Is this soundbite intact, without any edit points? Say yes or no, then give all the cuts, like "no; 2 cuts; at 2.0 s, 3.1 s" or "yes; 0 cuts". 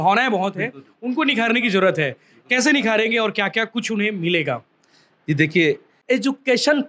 no; 1 cut; at 5.9 s